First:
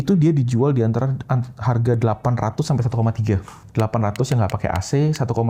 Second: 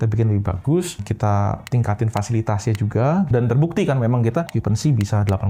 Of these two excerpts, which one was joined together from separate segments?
second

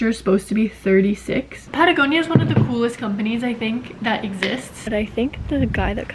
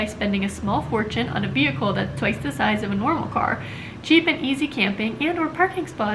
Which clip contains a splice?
first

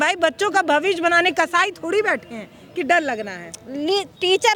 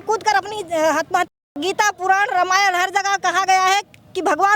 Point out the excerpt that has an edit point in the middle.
second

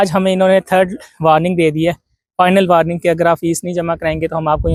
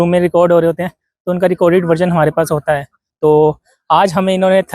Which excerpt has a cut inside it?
second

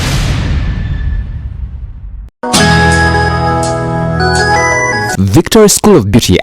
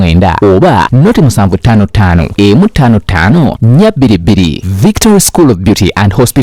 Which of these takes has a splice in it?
first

